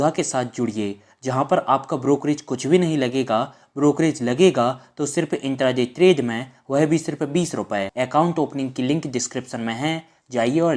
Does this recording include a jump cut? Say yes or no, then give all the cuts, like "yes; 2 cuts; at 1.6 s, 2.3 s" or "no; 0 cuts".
yes; 1 cut; at 7.9 s